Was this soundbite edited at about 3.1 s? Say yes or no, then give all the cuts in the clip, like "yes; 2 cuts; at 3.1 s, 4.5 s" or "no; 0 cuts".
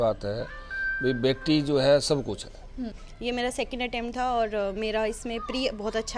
yes; 1 cut; at 3.1 s